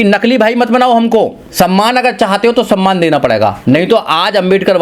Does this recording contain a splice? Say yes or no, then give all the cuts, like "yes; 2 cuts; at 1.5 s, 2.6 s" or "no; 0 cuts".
yes; 2 cuts; at 1.4 s, 3.6 s